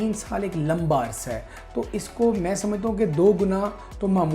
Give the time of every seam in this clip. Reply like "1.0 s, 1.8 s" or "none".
none